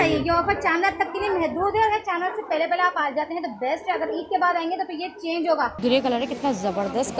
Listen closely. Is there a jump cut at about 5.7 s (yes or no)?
yes